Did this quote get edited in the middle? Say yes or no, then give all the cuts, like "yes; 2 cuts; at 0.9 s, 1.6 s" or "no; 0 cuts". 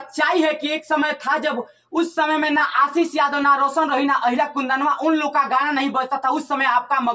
no; 0 cuts